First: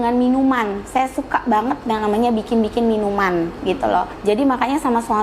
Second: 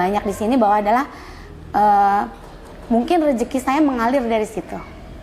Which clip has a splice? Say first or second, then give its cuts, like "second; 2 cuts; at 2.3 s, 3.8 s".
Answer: first; 1 cut; at 4.1 s